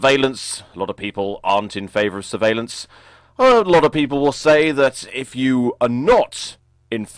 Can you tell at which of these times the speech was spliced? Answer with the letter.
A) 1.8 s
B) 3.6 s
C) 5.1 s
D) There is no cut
B